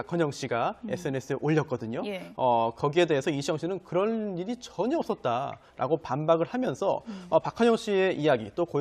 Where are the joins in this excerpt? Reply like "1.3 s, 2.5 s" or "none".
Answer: 5.5 s